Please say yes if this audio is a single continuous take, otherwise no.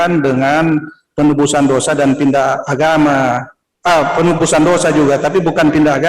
yes